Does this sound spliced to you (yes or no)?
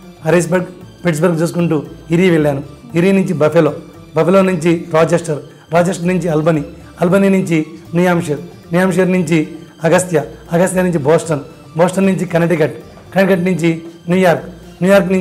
no